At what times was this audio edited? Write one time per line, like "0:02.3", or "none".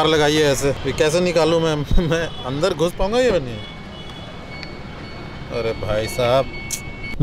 none